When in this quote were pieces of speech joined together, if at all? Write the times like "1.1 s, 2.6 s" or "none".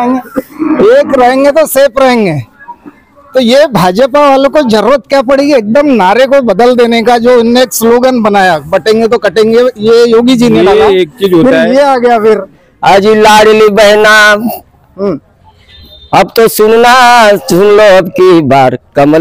12.5 s